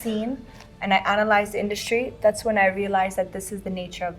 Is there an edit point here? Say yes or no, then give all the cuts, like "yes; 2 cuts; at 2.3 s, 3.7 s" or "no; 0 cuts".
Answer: no; 0 cuts